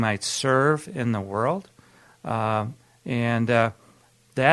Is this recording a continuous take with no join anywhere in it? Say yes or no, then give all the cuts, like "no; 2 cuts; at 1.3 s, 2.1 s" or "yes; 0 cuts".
yes; 0 cuts